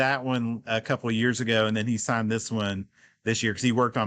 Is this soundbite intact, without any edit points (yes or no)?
yes